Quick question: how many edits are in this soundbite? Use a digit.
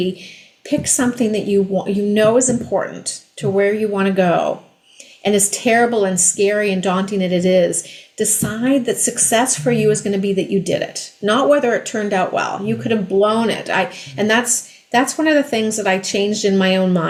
0